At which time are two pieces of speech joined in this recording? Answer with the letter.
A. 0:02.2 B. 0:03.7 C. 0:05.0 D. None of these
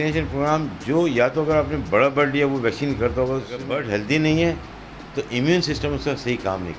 B